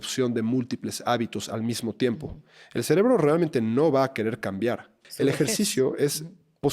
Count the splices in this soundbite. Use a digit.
1